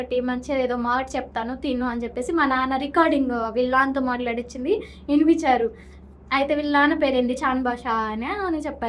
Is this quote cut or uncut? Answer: uncut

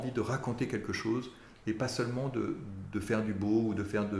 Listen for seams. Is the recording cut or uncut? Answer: uncut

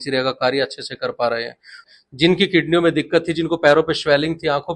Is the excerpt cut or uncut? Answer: cut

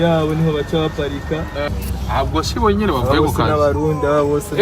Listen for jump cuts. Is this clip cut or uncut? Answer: cut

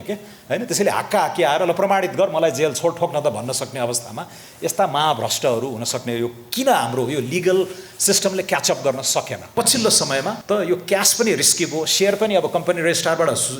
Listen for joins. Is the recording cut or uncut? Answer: cut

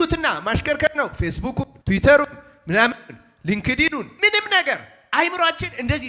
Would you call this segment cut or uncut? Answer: cut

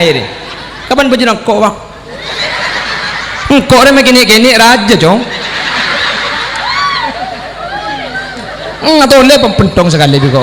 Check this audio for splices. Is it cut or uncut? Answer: uncut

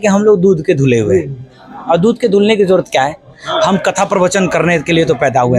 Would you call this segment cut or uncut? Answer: uncut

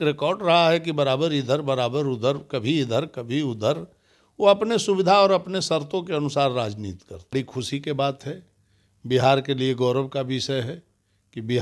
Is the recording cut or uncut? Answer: cut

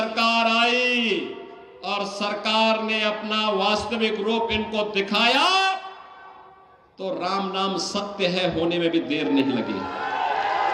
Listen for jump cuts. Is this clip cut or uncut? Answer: uncut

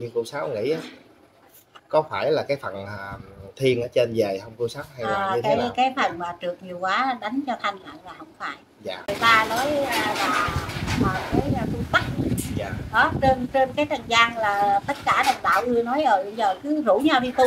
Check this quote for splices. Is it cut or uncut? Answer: cut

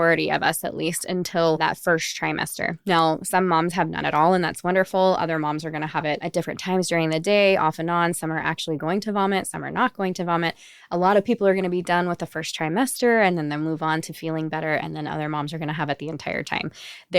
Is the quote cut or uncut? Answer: cut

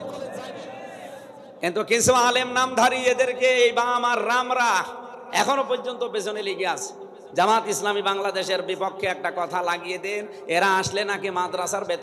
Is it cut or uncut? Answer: uncut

